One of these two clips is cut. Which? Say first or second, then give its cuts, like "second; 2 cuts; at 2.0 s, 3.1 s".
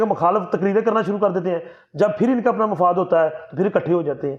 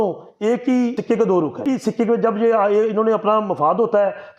second; 2 cuts; at 1.0 s, 1.6 s